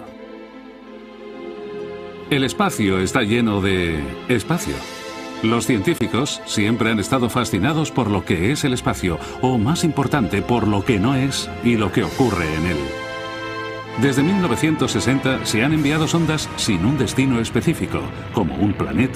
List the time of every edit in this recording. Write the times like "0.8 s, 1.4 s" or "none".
none